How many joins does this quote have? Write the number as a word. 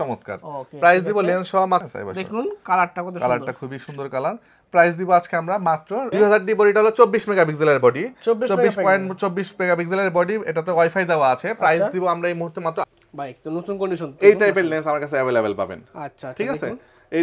three